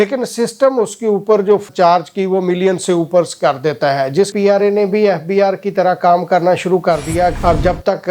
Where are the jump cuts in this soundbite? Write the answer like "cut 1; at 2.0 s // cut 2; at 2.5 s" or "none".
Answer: cut 1; at 1.6 s // cut 2; at 4.3 s // cut 3; at 7.3 s